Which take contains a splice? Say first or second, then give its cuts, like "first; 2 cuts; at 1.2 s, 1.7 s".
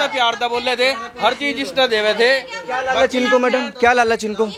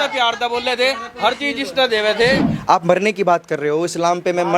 second; 1 cut; at 2.5 s